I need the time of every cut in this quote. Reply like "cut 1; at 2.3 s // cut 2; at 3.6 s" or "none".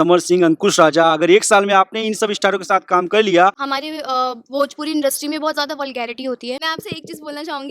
cut 1; at 3.7 s // cut 2; at 6.7 s